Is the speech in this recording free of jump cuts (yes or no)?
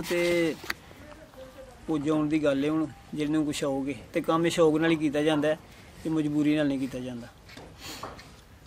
yes